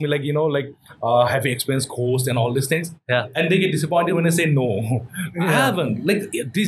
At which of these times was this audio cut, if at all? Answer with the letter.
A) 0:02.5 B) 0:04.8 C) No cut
C